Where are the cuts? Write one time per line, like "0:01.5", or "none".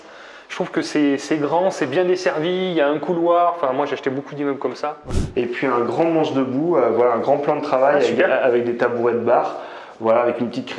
0:05.0